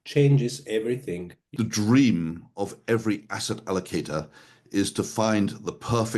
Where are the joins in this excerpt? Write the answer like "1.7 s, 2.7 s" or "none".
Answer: 1.4 s

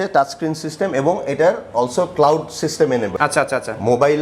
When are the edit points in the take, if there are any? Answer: none

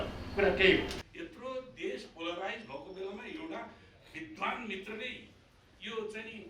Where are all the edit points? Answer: 1.0 s

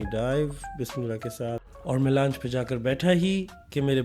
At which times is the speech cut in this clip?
1.7 s

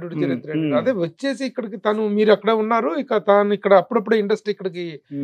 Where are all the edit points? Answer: none

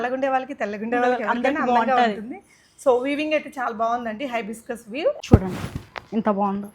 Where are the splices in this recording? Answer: 5.2 s

